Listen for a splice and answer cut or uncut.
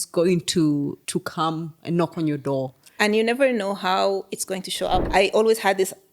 cut